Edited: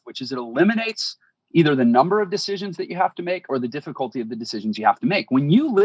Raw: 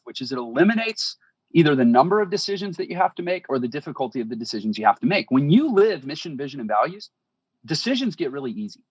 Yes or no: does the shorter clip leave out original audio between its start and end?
no